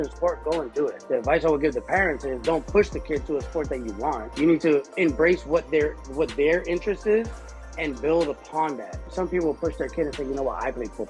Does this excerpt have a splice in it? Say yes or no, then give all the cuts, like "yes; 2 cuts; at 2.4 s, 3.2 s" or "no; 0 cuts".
yes; 4 cuts; at 1.0 s, 4.3 s, 4.9 s, 9.1 s